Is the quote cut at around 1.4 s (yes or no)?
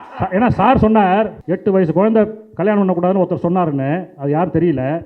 yes